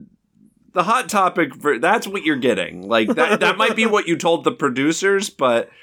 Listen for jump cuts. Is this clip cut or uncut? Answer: uncut